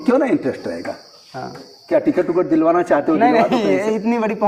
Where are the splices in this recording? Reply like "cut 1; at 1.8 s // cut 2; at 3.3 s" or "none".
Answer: none